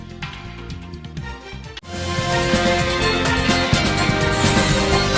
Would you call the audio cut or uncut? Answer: uncut